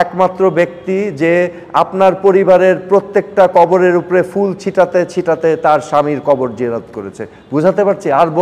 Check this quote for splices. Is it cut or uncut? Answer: uncut